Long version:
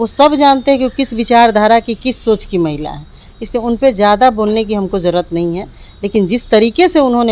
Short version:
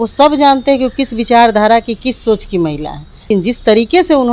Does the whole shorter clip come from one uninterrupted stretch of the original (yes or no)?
no